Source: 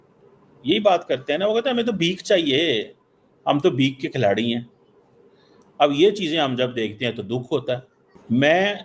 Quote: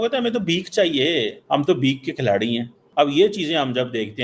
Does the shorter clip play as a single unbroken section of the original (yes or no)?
no